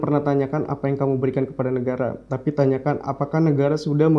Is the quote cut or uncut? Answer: uncut